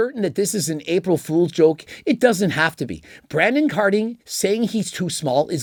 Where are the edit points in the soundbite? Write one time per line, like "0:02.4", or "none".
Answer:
none